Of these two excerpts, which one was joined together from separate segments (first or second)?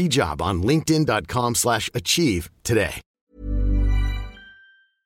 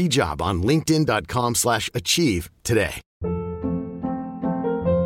second